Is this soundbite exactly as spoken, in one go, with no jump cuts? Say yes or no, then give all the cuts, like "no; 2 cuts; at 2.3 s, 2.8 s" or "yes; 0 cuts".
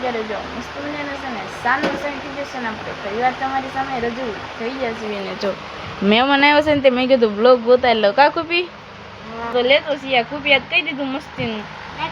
no; 1 cut; at 9.5 s